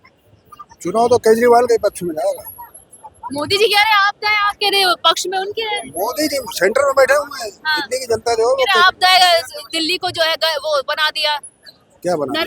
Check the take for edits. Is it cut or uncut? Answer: uncut